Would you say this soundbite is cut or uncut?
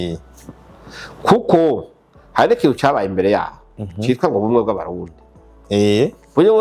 uncut